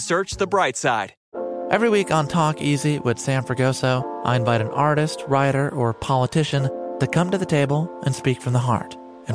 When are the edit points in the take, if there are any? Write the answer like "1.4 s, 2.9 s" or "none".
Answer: 1.2 s